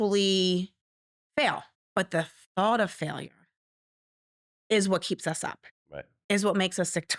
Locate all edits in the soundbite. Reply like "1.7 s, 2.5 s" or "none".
1.7 s

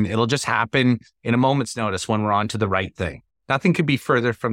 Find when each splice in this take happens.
3.2 s

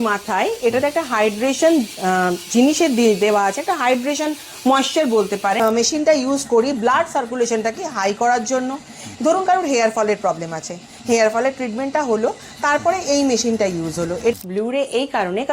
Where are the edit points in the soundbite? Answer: 5.6 s, 14.3 s

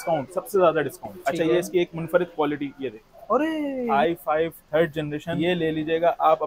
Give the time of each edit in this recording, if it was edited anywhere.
1.1 s, 3.9 s, 5.4 s

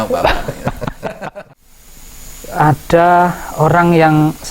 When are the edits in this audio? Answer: 1.2 s

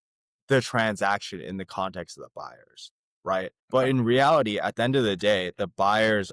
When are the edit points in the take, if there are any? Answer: 3.6 s

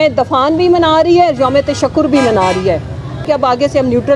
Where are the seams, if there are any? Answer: 3.2 s

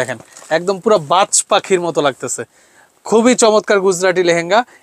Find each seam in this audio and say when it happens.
none

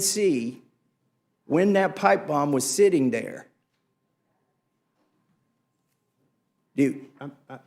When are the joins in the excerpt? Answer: none

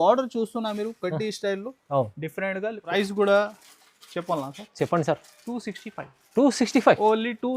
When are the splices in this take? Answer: 2.9 s

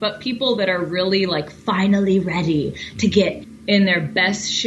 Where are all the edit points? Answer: 3.5 s

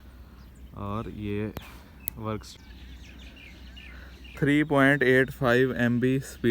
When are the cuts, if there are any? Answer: 2.5 s

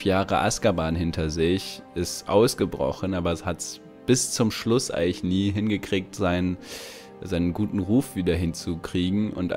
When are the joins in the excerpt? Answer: none

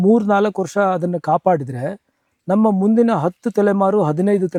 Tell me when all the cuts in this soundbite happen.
none

